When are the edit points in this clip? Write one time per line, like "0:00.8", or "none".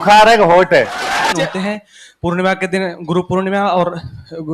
0:01.2